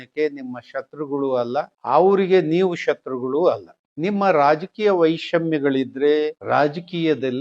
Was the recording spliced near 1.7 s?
no; 1 cut; at 6.4 s

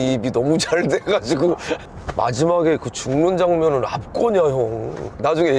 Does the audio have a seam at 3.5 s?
no; 1 cut; at 1.8 s

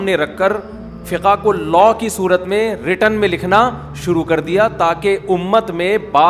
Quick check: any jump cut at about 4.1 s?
no; 1 cut; at 1.0 s

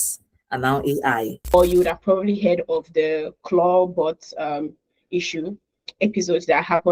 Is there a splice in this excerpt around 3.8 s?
no; 1 cut; at 1.5 s

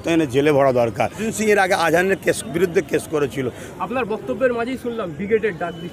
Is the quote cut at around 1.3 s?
yes; 2 cuts; at 1.3 s, 3.6 s

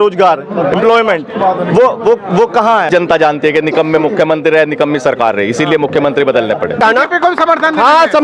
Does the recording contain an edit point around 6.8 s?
yes; 2 cuts; at 2.9 s, 6.8 s

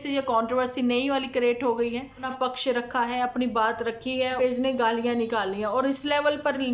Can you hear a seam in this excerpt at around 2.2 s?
yes; 2 cuts; at 2.2 s, 4.4 s

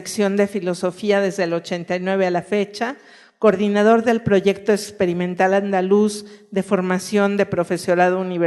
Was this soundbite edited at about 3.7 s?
yes; 1 cut; at 3.7 s

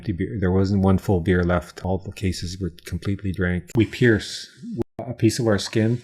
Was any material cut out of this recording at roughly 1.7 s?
yes; 3 cuts; at 1.7 s, 3.7 s, 5.0 s

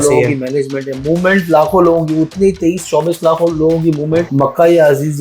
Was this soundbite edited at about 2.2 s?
no; 1 cut; at 4.3 s

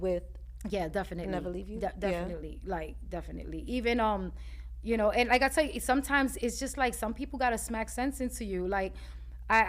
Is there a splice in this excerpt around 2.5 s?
no; 0 cuts

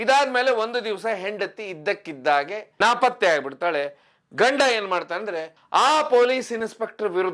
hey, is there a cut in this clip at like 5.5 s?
yes; 1 cut; at 5.5 s

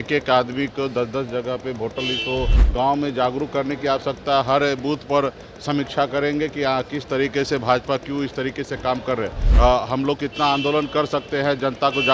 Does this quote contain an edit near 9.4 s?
yes; 2 cuts; at 2.6 s, 9.4 s

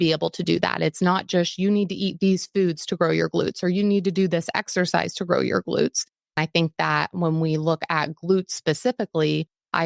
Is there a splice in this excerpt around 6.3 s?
yes; 1 cut; at 6.3 s

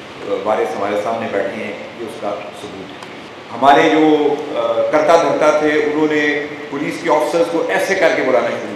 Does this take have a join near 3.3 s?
yes; 1 cut; at 3.3 s

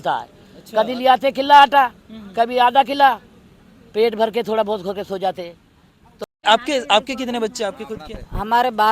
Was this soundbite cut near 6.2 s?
yes; 1 cut; at 6.2 s

